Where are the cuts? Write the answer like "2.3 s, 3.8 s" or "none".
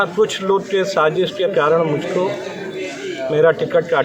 none